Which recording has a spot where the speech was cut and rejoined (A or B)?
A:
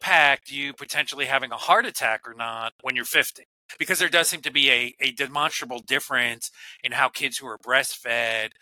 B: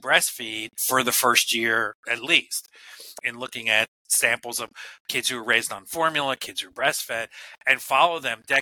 B